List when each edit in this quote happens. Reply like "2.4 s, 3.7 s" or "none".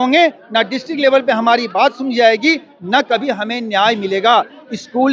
none